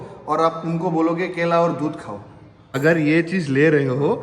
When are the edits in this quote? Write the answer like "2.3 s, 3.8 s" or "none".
2.7 s